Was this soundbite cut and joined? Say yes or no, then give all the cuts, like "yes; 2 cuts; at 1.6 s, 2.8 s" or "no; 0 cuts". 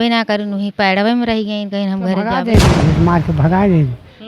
yes; 1 cut; at 2.5 s